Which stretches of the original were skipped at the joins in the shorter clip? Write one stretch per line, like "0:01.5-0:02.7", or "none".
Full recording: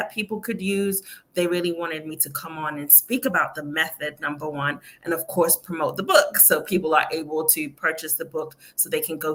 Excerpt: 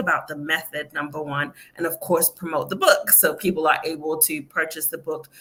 none